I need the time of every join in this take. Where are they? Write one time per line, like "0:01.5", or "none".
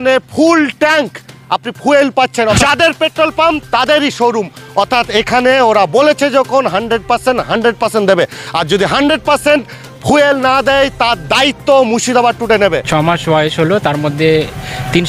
0:02.6
0:12.8